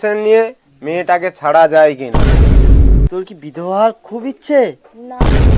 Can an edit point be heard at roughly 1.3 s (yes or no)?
no